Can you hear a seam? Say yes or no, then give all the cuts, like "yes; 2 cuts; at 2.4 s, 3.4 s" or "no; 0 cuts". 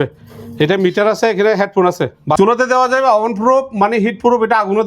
yes; 1 cut; at 2.4 s